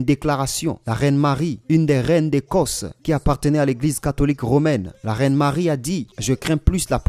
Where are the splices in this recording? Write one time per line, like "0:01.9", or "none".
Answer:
0:06.1